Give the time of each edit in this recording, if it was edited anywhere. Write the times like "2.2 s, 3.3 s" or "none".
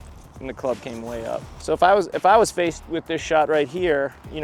1.5 s